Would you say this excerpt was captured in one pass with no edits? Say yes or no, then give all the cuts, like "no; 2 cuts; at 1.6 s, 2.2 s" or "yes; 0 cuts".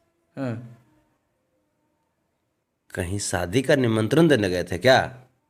yes; 0 cuts